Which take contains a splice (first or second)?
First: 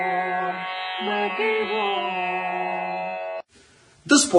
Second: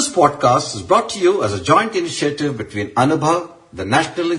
first